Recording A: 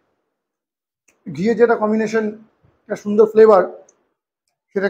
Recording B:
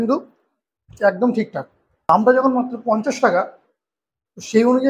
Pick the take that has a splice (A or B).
B